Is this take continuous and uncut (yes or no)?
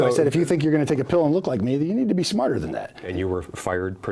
no